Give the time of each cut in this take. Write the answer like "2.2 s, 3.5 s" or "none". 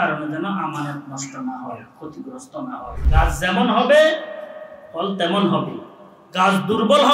3.0 s